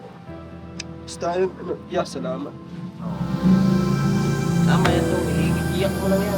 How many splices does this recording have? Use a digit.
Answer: 0